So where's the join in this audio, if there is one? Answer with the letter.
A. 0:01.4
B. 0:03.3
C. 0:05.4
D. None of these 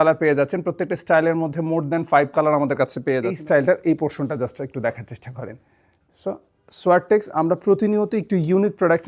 B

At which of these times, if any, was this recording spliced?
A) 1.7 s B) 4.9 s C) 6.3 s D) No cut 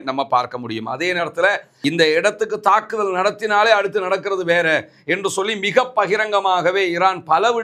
A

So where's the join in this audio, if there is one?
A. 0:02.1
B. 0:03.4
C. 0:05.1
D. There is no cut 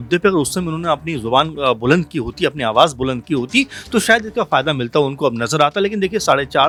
D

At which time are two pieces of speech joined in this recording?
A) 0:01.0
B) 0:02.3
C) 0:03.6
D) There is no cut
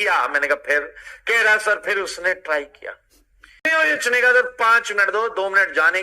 C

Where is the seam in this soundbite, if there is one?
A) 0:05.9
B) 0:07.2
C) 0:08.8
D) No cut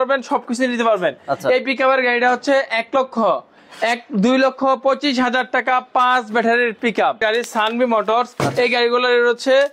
B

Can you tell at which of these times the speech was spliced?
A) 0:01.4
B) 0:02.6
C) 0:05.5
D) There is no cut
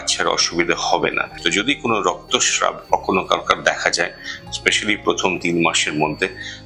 A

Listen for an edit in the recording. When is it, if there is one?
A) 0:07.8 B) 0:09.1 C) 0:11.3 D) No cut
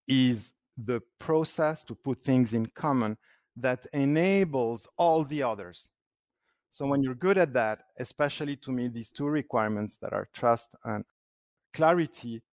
C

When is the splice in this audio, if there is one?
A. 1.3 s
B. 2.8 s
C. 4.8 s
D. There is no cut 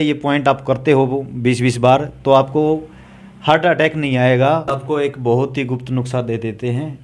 C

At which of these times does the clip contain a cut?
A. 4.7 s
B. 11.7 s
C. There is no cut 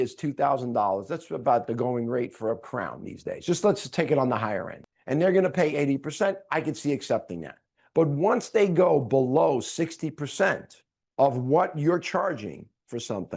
A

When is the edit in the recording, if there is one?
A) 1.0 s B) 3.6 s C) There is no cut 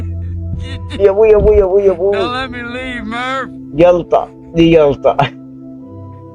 A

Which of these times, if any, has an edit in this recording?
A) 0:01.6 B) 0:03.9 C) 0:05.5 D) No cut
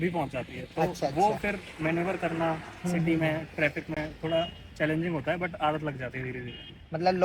D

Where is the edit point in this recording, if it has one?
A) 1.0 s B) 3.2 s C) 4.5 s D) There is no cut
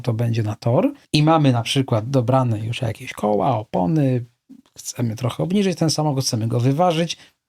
A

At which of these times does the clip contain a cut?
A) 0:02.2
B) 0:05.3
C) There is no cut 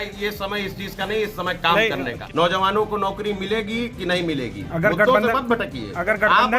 A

